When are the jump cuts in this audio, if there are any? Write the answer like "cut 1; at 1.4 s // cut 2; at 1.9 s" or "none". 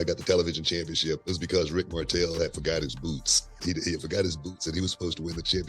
cut 1; at 1.2 s // cut 2; at 3.6 s